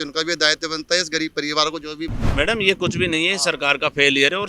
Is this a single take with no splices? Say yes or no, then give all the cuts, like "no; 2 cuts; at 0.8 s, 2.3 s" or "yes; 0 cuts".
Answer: no; 1 cut; at 2.2 s